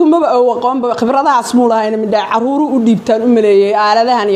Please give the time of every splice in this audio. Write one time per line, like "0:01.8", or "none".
none